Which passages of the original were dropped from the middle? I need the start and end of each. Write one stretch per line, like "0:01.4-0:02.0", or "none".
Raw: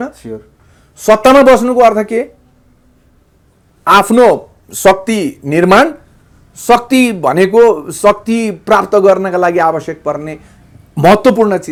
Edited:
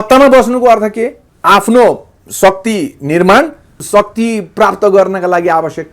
0:02.4-0:03.7
0:06.2-0:07.9